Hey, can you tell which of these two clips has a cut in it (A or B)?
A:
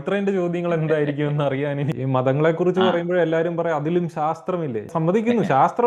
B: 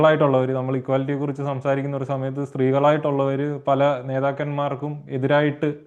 A